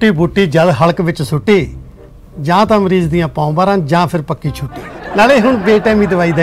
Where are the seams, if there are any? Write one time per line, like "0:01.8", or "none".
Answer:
0:05.0